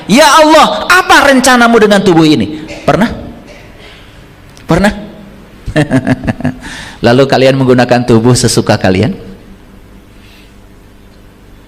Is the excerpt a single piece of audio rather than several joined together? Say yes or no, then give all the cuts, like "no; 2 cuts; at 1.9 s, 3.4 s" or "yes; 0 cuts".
yes; 0 cuts